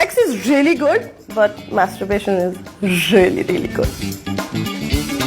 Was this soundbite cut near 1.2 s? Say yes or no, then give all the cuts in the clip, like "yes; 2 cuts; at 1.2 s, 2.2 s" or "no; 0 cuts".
yes; 2 cuts; at 1.2 s, 4.0 s